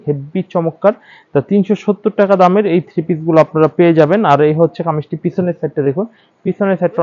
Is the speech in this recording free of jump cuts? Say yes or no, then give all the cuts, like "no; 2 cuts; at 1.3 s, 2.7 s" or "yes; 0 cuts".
yes; 0 cuts